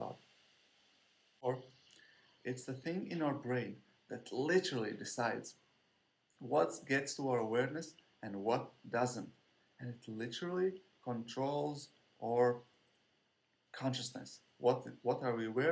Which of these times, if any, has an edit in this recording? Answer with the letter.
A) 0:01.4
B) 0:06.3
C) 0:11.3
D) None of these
A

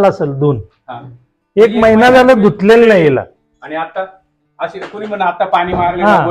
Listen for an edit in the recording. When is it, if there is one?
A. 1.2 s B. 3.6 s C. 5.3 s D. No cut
D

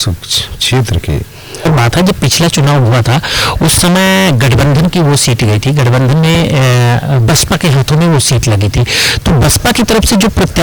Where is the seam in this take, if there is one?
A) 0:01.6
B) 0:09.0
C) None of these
A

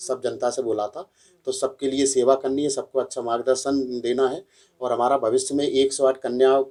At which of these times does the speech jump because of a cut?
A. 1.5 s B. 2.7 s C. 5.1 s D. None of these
D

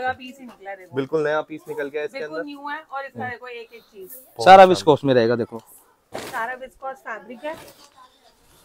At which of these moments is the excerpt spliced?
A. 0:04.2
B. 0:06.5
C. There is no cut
C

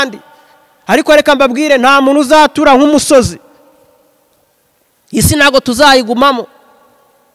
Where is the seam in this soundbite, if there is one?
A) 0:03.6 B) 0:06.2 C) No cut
C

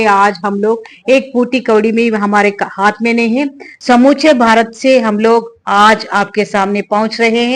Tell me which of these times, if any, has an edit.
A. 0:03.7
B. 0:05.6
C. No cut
A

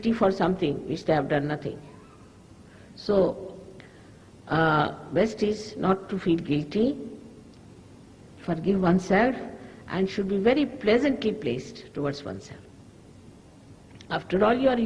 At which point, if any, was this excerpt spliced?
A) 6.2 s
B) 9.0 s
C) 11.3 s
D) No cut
A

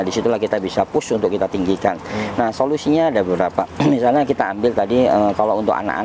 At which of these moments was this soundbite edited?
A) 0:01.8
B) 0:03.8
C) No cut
C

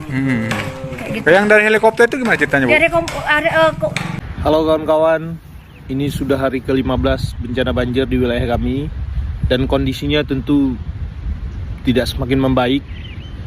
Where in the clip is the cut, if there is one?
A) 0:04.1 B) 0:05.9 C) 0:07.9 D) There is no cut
A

